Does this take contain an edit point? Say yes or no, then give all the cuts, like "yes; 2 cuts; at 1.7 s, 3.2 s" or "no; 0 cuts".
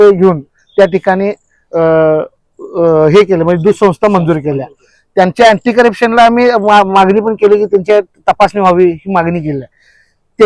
no; 0 cuts